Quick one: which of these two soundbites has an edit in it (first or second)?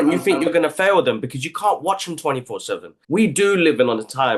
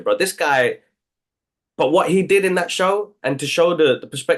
first